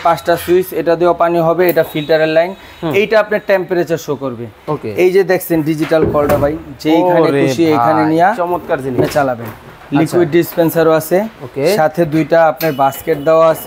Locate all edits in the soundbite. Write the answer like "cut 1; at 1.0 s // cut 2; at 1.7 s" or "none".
none